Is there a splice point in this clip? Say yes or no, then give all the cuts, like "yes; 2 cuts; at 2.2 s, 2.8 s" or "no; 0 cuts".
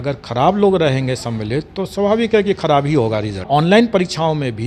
yes; 1 cut; at 3.5 s